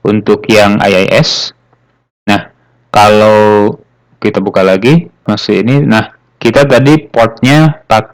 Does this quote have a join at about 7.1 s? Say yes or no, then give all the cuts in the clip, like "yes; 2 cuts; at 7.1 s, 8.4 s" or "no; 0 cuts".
no; 1 cut; at 5.2 s